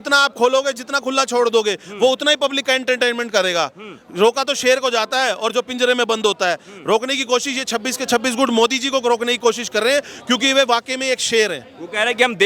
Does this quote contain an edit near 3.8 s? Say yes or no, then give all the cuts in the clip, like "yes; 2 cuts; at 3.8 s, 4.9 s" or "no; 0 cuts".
no; 0 cuts